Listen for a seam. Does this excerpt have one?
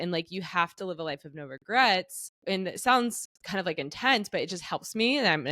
yes; 1 cut; at 2.3 s

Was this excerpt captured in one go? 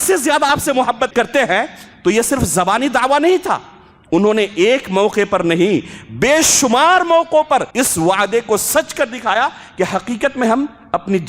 no; 2 cuts; at 1.1 s, 7.7 s

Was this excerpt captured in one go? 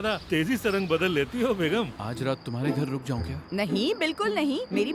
no; 1 cut; at 2.0 s

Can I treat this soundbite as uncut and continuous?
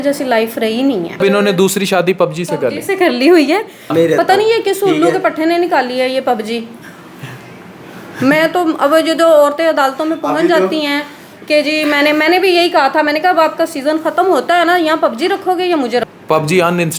no; 3 cuts; at 1.2 s, 3.9 s, 16.0 s

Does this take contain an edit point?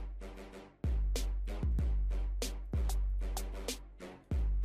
yes; 1 cut; at 1.2 s

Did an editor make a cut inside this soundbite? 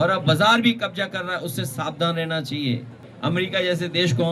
yes; 1 cut; at 3.1 s

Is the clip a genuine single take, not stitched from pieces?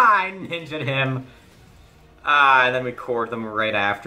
yes; 0 cuts

